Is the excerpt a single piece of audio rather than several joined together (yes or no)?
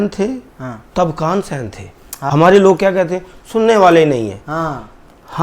no